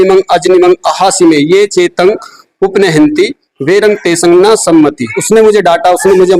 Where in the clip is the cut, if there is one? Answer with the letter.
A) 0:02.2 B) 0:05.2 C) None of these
B